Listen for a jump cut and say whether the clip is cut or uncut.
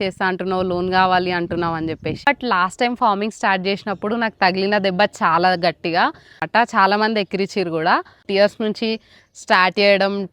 cut